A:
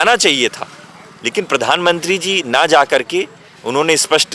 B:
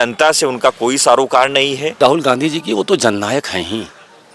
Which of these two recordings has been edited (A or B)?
B